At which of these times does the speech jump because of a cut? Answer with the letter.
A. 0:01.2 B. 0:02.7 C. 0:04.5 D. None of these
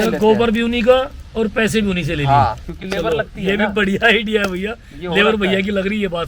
D